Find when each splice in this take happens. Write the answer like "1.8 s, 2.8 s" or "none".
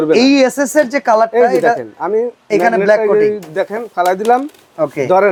none